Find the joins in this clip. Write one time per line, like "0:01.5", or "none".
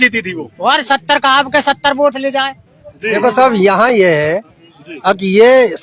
none